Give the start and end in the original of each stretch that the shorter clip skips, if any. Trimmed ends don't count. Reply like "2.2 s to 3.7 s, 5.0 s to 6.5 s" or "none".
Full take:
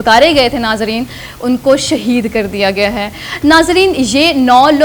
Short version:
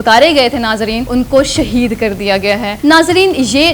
1.0 s to 1.4 s, 3.0 s to 3.3 s